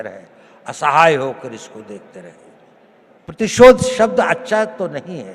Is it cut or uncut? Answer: cut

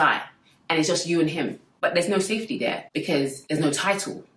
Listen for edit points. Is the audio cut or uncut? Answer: uncut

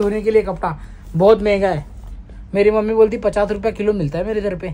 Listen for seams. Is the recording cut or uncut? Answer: uncut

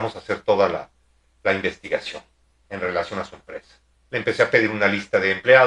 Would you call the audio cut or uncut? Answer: uncut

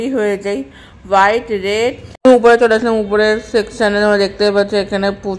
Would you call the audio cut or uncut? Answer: cut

